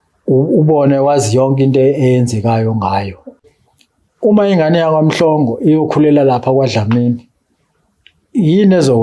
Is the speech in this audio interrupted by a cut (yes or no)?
yes